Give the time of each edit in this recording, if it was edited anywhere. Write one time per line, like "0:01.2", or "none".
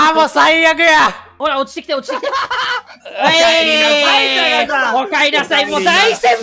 0:01.3